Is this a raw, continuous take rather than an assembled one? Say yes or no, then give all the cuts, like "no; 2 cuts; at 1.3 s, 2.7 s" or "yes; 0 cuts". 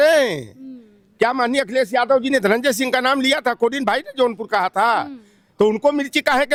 yes; 0 cuts